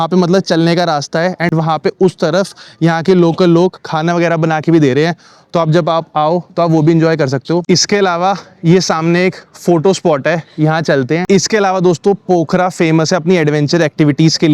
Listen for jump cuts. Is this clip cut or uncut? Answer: uncut